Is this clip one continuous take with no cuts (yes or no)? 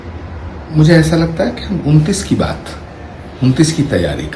yes